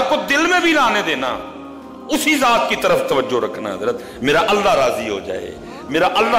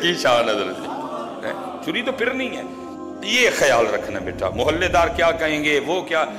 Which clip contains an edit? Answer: second; 1 cut; at 3.1 s

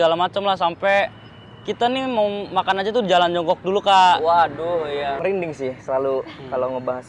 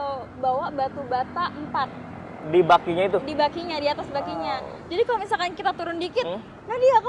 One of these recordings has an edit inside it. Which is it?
first; 1 cut; at 5.2 s

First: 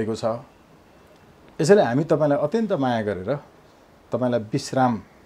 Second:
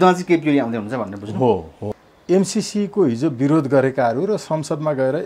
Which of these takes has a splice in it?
second; 1 cut; at 2.1 s

